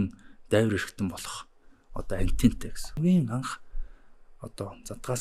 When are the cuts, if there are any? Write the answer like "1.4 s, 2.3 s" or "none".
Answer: 3.0 s

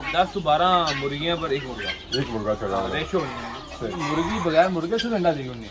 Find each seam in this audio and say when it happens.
3.9 s

